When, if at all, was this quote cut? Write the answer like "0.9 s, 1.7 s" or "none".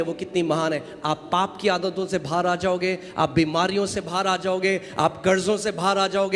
none